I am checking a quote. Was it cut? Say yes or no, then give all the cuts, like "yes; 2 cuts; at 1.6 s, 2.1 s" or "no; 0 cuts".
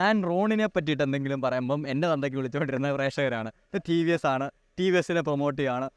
no; 0 cuts